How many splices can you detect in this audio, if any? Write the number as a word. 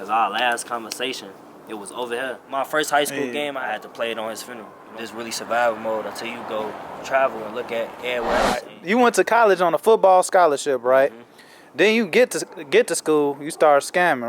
four